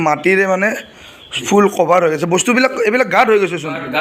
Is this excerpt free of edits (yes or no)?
yes